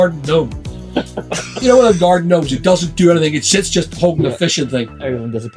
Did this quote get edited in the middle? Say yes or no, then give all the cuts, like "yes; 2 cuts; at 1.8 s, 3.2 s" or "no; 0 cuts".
no; 0 cuts